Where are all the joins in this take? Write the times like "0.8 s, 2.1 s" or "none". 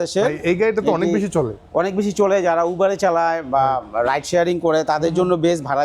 none